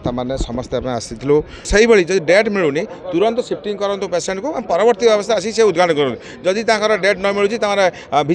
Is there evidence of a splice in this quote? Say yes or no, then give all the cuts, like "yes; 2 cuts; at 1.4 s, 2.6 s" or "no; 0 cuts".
yes; 1 cut; at 1.6 s